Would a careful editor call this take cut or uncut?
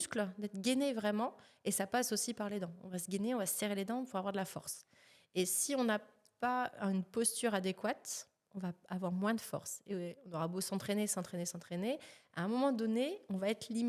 uncut